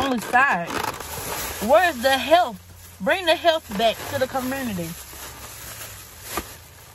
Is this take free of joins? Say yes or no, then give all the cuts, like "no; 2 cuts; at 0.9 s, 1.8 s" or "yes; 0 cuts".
no; 1 cut; at 1.0 s